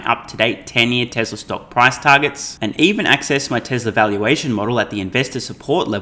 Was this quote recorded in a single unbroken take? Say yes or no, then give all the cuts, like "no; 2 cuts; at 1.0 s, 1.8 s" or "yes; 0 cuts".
yes; 0 cuts